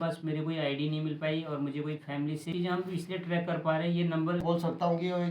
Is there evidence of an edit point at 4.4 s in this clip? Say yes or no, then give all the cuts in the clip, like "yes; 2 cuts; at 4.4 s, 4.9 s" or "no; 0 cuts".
yes; 2 cuts; at 2.5 s, 4.4 s